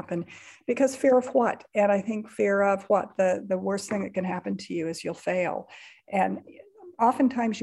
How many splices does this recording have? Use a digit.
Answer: 0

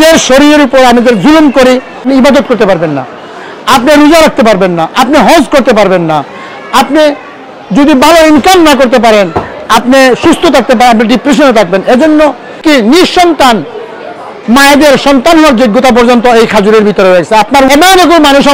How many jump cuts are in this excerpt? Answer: 3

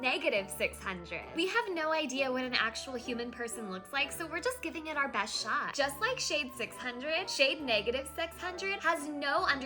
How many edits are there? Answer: 1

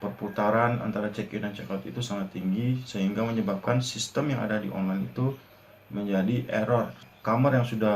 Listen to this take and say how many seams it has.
1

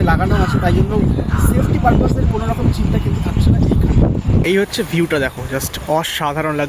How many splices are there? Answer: 0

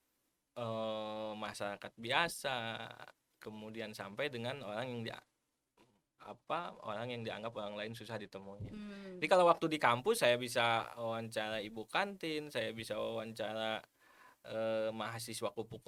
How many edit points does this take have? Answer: 0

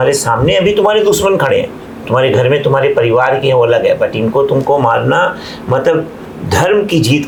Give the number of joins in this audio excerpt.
0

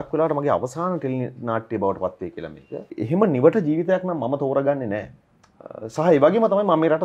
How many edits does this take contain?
1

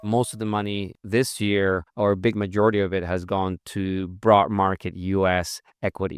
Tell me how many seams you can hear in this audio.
2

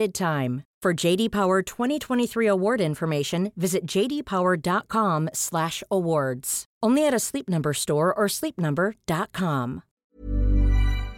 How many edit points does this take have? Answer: 1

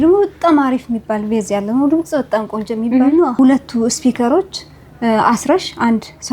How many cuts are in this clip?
1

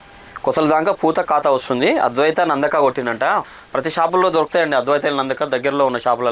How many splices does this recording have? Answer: 1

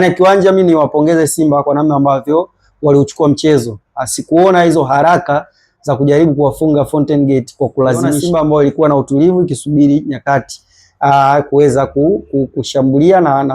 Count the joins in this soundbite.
1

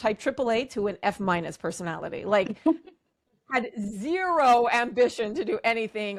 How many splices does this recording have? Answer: 0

